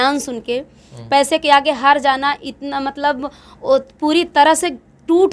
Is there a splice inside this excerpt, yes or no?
no